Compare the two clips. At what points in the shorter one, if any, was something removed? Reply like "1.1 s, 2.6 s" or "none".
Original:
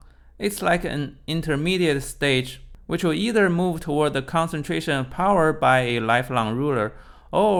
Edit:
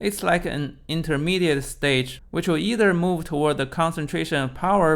2.2 s